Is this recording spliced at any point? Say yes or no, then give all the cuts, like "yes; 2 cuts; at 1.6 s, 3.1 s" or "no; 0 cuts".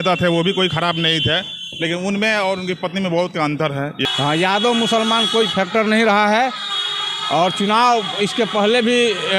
yes; 1 cut; at 4.0 s